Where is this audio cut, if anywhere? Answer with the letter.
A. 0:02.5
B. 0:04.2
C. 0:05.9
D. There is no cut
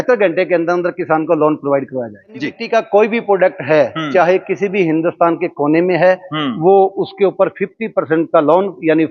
A